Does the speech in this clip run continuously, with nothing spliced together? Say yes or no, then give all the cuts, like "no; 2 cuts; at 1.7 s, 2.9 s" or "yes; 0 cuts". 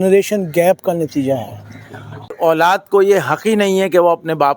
no; 1 cut; at 2.3 s